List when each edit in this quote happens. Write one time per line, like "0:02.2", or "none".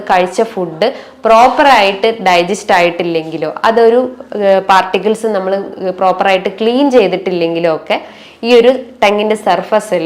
none

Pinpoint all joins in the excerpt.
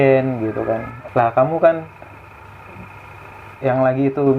0:00.9

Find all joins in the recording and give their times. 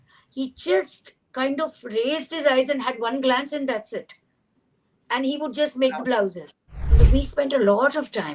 0:06.9

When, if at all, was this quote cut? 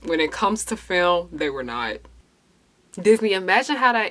0:02.2

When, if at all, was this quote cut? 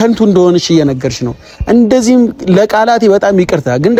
none

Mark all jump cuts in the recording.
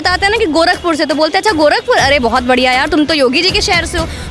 none

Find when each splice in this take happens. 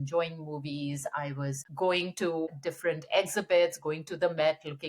0:01.6
0:02.5

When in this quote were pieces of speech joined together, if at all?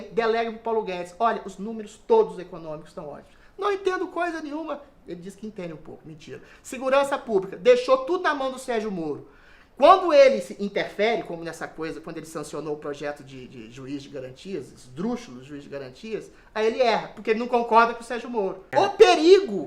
0:18.6

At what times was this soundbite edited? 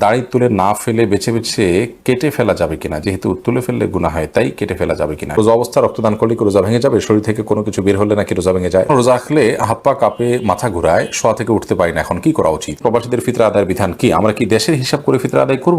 0:05.4
0:08.9
0:12.8

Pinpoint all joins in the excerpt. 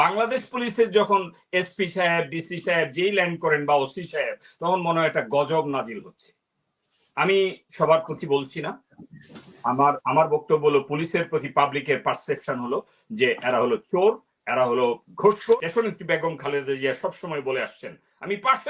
0:15.6

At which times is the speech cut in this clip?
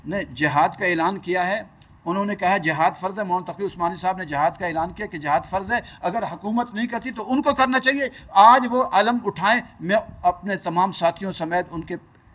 none

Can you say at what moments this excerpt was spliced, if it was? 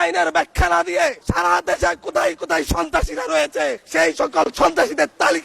0:01.2
0:03.8

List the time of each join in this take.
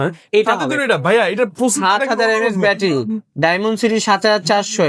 none

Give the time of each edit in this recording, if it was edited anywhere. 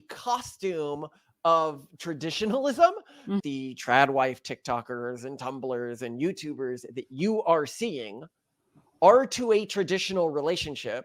0:03.4

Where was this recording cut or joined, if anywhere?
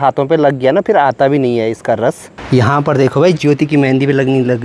0:02.3

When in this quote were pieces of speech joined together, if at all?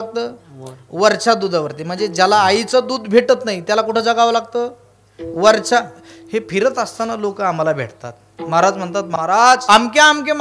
0:09.1

